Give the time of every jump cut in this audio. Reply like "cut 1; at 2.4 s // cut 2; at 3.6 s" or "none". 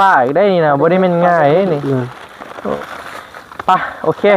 cut 1; at 2.7 s